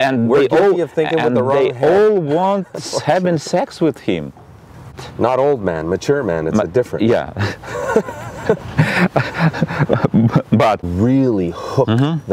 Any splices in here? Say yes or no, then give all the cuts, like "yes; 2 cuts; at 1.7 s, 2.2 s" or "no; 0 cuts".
yes; 2 cuts; at 5.1 s, 10.8 s